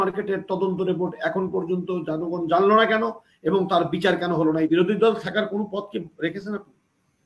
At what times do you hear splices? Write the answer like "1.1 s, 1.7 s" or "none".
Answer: 4.7 s